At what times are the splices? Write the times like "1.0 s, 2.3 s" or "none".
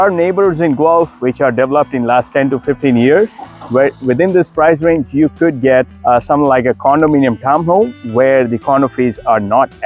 none